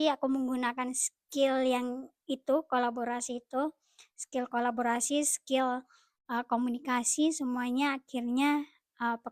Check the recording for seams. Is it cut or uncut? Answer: uncut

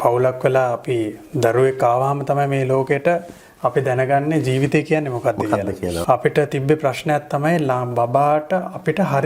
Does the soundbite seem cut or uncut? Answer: cut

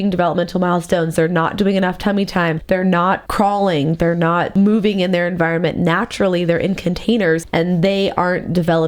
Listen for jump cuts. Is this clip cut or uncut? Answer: cut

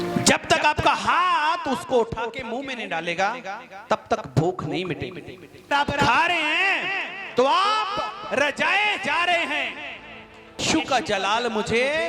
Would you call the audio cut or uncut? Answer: cut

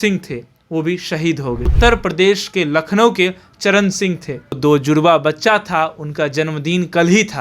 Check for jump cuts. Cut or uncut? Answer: cut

